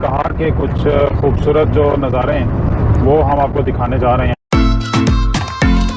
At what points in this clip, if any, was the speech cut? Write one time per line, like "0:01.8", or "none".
none